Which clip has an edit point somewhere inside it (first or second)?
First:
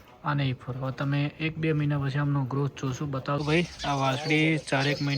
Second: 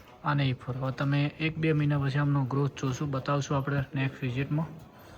first